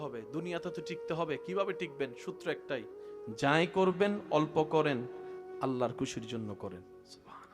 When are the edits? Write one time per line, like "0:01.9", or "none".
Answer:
none